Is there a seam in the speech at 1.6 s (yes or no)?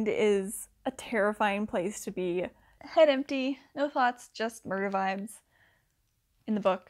no